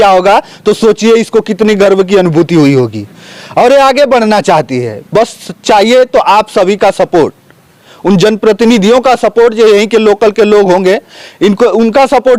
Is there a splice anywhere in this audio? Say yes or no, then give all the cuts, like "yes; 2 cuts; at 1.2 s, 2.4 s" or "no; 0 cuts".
no; 0 cuts